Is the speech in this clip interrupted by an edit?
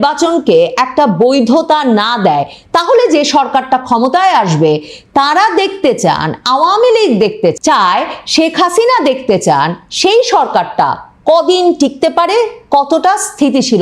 yes; 1 cut; at 7.6 s

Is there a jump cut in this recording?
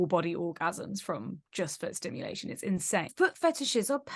yes; 1 cut; at 3.1 s

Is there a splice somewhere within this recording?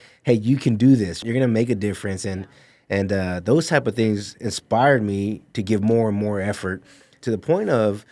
yes; 2 cuts; at 1.2 s, 7.2 s

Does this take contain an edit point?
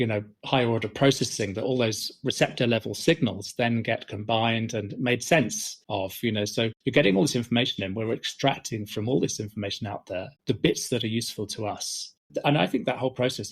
yes; 1 cut; at 12.1 s

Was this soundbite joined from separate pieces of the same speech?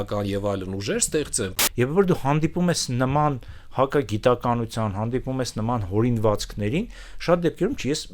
yes; 1 cut; at 1.5 s

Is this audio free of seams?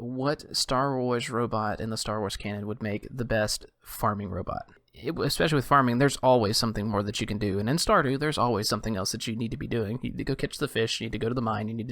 no; 1 cut; at 4.8 s

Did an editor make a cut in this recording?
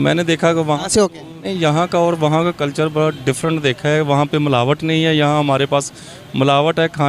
yes; 1 cut; at 1.5 s

